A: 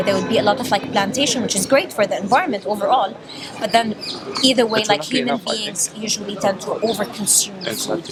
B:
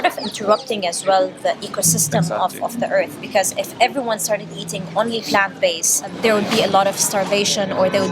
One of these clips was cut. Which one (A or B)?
B